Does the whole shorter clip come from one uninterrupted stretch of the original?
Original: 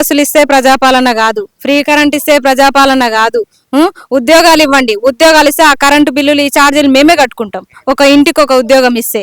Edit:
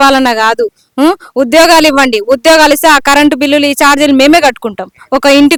yes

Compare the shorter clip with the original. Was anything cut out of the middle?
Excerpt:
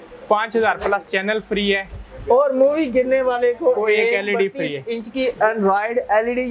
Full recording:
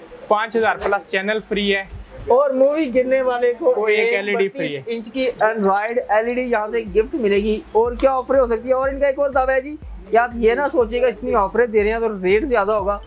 no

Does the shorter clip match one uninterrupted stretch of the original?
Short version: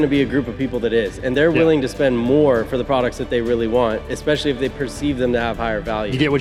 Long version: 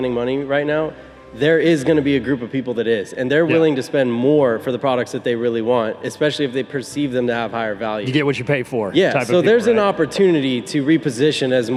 yes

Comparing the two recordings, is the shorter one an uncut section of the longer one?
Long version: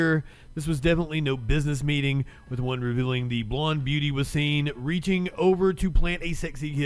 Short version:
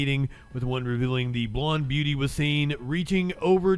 yes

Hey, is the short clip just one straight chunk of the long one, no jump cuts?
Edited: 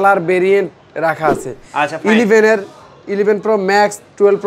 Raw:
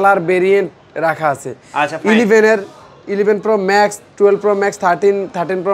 yes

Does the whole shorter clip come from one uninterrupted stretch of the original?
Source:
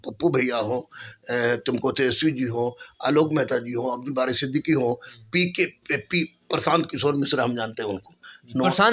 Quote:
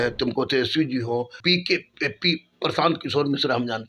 no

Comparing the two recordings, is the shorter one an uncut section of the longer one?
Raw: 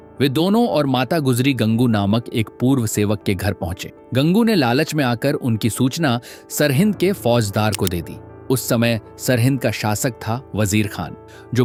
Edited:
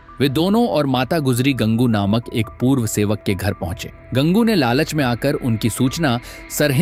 yes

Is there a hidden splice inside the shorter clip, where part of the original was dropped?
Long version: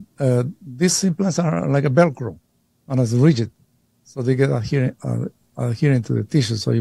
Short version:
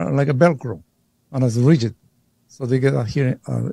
no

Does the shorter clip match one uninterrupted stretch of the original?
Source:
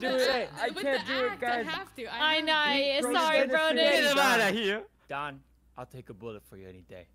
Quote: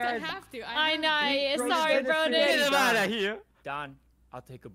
yes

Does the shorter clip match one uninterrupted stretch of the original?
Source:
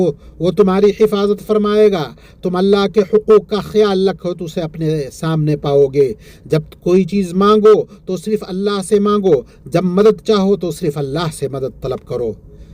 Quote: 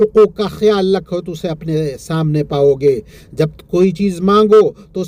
yes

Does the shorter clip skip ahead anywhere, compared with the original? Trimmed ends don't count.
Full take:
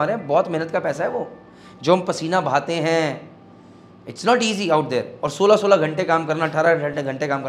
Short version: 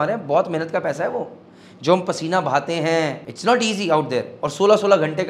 yes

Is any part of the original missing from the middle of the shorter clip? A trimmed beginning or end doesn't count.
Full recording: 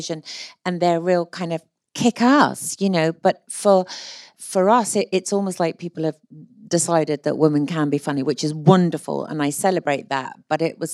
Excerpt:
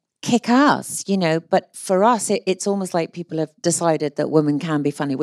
yes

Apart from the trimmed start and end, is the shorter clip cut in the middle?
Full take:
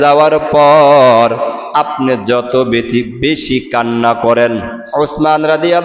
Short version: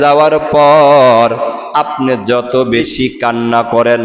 yes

